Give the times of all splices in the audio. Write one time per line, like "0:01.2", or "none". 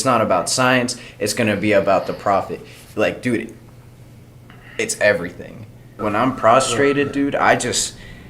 0:06.0